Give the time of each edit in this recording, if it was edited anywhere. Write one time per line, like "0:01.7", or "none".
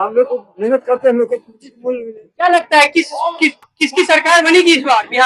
none